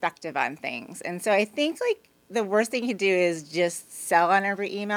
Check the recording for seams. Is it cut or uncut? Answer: uncut